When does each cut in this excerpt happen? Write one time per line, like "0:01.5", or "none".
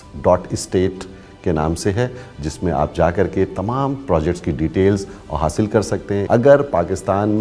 0:06.2